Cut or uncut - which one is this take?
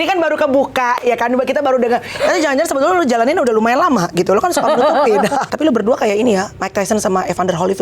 cut